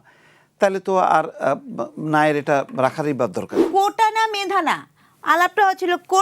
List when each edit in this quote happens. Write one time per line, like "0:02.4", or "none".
0:03.6